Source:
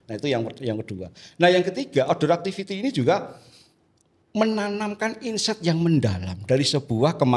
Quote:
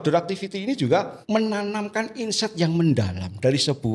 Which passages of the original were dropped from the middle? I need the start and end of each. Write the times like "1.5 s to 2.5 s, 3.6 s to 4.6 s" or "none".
3.3 s to 4.2 s